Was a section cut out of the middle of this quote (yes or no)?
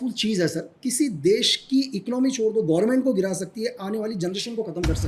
no